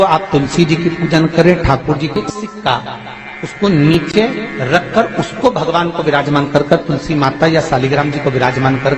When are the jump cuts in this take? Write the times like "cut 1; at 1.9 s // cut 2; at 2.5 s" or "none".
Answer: cut 1; at 2.1 s